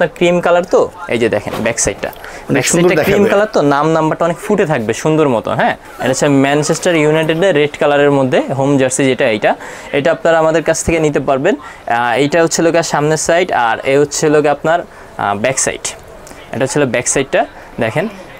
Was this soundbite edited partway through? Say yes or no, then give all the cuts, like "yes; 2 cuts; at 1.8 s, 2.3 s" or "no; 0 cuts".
yes; 1 cut; at 5.9 s